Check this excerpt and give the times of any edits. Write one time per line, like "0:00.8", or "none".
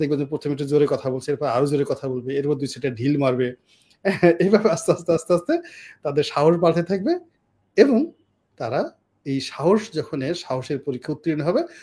none